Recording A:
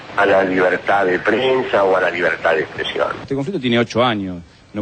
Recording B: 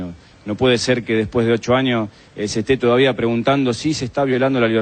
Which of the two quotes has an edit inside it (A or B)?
A